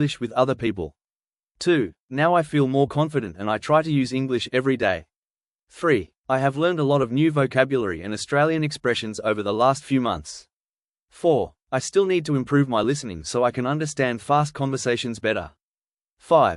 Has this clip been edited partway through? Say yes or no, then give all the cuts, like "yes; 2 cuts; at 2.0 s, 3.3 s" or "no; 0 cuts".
no; 0 cuts